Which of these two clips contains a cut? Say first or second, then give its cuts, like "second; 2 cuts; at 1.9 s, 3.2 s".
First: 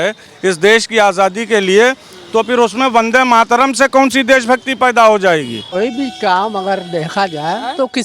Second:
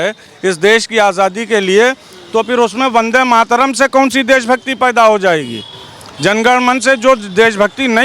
first; 1 cut; at 5.7 s